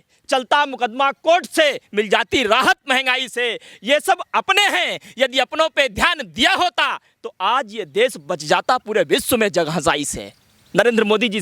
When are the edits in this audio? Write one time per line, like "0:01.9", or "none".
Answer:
none